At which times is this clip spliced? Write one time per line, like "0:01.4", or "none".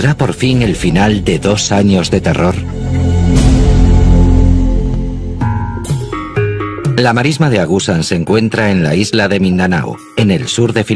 0:01.2